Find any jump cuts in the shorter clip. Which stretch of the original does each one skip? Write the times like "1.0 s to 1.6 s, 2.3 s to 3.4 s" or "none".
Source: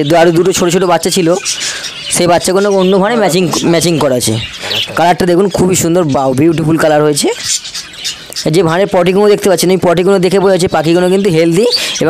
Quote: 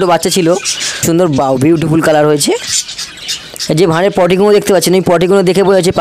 1.8 s to 5.8 s